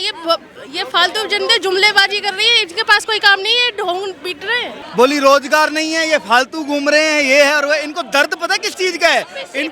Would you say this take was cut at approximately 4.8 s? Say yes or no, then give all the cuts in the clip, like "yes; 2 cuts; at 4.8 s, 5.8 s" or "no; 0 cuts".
yes; 1 cut; at 4.8 s